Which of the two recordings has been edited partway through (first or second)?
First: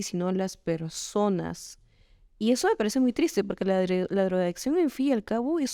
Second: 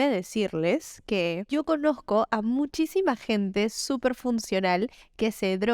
second